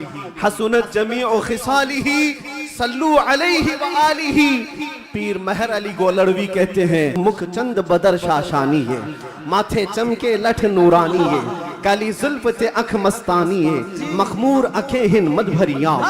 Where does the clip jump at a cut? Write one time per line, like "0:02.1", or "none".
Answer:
0:07.1